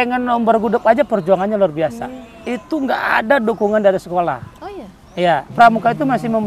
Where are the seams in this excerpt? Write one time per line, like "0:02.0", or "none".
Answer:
0:05.5